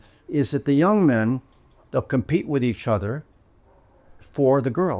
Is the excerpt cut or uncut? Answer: cut